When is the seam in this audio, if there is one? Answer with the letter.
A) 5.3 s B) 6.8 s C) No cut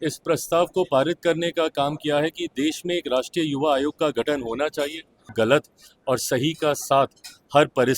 A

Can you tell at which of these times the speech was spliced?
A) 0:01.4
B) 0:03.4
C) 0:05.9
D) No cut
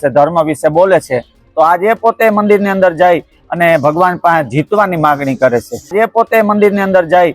C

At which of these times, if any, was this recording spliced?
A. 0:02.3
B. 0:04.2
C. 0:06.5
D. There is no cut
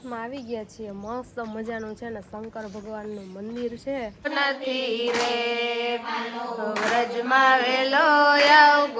B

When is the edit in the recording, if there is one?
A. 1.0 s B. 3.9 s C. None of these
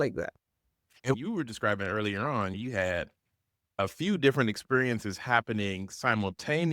C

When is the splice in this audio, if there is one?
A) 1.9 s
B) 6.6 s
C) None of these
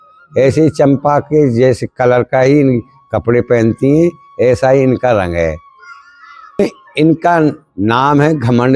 B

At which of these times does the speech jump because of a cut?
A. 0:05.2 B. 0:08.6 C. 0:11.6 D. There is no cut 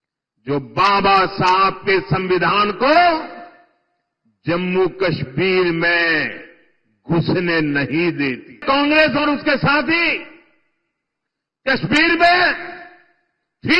B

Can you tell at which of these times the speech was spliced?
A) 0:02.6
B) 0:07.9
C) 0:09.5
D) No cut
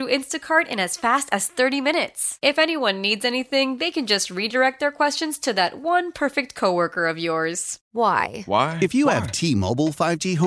B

